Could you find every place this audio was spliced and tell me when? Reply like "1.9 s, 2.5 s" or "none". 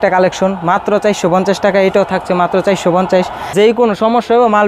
3.5 s